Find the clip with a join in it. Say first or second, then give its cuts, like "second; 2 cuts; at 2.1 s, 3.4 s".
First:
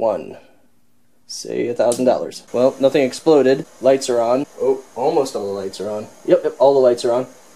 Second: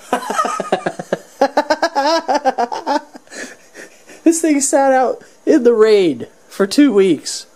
first; 3 cuts; at 2.4 s, 3.7 s, 4.5 s